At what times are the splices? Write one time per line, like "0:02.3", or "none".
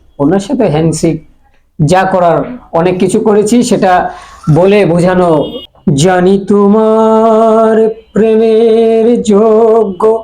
0:05.6